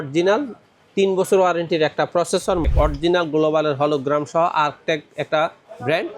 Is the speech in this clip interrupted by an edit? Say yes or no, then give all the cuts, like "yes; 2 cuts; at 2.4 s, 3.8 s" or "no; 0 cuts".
yes; 1 cut; at 2.7 s